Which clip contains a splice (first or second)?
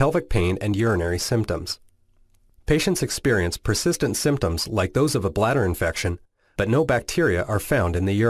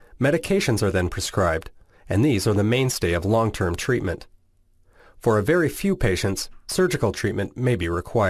second